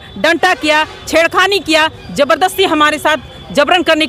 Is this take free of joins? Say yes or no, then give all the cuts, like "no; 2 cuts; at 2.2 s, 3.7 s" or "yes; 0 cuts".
yes; 0 cuts